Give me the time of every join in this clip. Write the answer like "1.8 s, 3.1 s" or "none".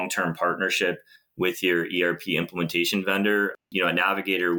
3.6 s